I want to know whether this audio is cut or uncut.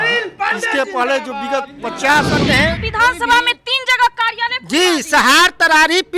cut